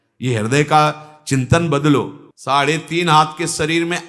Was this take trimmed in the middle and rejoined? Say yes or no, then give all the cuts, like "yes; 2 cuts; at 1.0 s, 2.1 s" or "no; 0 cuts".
yes; 1 cut; at 2.2 s